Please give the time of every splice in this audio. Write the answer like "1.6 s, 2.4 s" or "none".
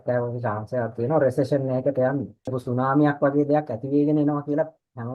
2.6 s